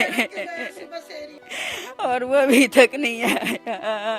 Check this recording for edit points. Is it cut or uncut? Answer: cut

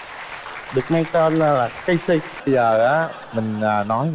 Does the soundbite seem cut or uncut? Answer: cut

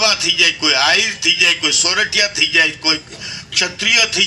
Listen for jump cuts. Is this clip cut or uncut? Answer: uncut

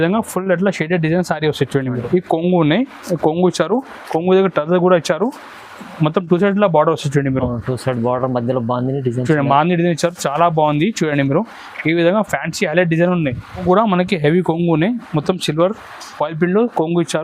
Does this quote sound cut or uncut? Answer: cut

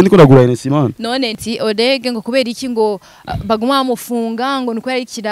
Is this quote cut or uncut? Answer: cut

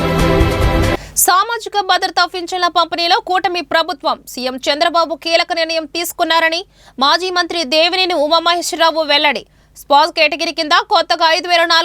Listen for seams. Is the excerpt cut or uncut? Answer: uncut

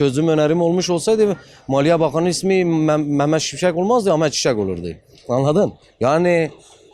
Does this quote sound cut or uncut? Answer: uncut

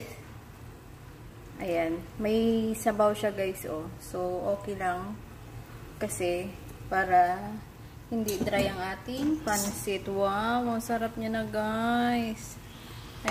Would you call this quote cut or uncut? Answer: uncut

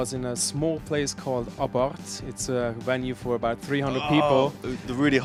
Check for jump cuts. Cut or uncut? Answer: uncut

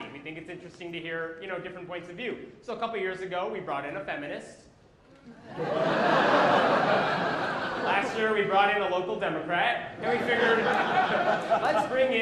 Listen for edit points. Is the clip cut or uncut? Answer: cut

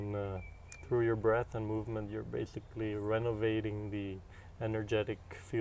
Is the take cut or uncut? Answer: uncut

